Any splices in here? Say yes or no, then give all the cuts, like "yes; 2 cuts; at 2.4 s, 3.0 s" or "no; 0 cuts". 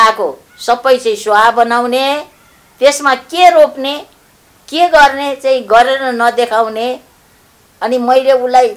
no; 0 cuts